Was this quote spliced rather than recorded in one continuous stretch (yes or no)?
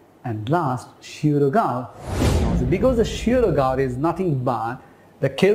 yes